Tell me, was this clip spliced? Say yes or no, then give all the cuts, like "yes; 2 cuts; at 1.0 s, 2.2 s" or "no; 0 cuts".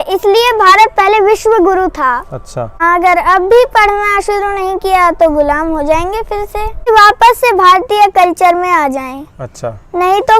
yes; 2 cuts; at 2.8 s, 6.9 s